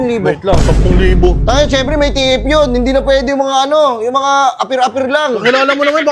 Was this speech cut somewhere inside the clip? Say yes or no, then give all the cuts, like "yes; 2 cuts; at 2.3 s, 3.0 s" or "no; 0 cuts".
no; 0 cuts